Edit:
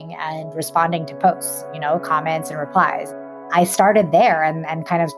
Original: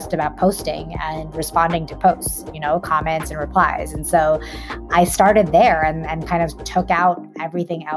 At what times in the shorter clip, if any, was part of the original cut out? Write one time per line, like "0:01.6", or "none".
0:03.1